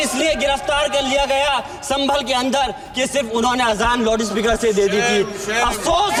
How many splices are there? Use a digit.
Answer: 0